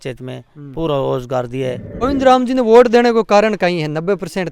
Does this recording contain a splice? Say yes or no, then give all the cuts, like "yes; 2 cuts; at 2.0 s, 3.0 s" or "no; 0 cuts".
yes; 1 cut; at 1.9 s